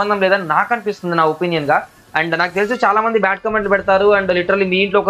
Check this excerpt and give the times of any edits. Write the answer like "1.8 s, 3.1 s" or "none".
none